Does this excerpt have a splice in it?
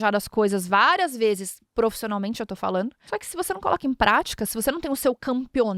yes; 1 cut; at 3.0 s

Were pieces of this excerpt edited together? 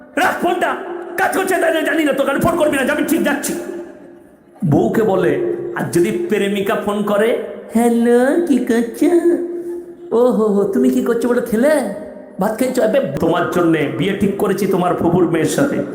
yes; 1 cut; at 13.2 s

